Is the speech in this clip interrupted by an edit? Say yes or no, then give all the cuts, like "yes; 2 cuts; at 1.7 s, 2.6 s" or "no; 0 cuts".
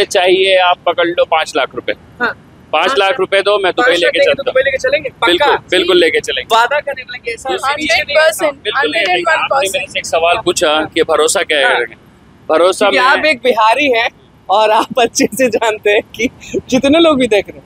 no; 0 cuts